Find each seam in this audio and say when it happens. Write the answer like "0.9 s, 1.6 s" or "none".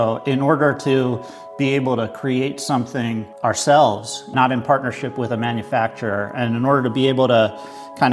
none